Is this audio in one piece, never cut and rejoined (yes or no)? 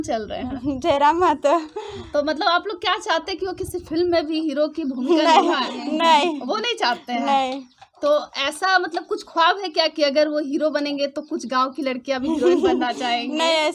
yes